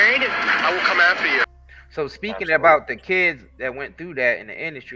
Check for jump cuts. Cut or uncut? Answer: cut